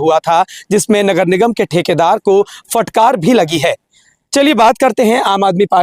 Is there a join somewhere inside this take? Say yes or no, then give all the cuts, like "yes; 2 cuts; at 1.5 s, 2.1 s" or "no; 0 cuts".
no; 0 cuts